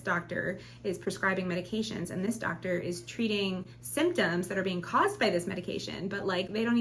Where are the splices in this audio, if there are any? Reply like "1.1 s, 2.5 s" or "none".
none